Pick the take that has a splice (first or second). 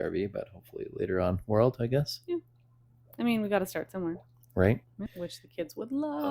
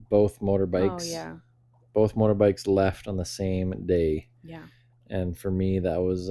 first